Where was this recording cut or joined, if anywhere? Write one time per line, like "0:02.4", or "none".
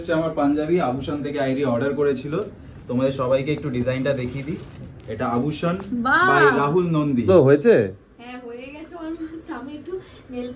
0:07.3